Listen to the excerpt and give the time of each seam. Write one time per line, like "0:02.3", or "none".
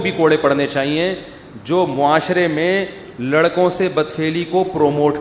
none